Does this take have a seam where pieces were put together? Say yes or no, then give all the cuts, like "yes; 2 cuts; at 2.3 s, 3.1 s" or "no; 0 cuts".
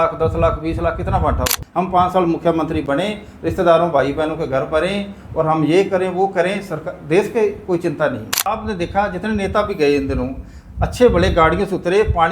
yes; 2 cuts; at 1.6 s, 8.6 s